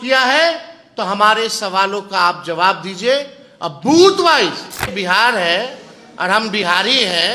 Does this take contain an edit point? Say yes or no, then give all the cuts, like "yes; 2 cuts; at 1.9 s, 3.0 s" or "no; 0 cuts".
yes; 1 cut; at 4.9 s